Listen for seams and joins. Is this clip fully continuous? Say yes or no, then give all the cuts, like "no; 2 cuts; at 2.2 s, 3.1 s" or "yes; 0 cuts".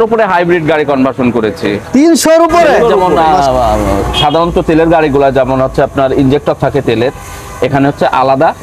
no; 1 cut; at 3.0 s